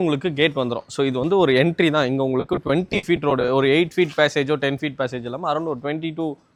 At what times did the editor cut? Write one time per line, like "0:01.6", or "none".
none